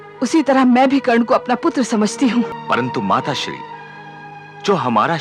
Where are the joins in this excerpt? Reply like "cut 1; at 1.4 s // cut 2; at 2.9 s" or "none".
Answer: cut 1; at 2.5 s